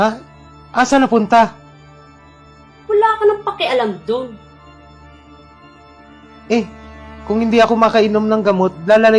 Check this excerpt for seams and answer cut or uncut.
uncut